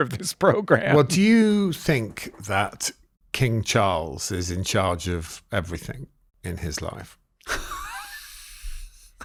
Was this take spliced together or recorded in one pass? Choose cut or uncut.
uncut